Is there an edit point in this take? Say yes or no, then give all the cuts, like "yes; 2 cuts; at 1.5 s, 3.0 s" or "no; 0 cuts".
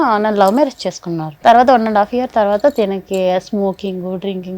yes; 1 cut; at 1.3 s